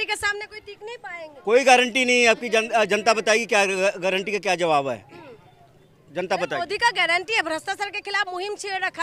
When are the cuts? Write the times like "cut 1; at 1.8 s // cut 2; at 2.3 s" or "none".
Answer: none